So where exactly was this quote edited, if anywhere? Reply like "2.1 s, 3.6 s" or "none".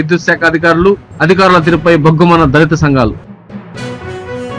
3.2 s